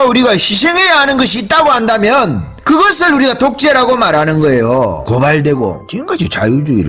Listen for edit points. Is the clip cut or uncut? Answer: cut